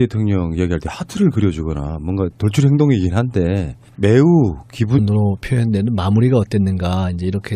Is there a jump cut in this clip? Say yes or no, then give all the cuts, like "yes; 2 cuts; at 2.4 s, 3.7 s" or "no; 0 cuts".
no; 0 cuts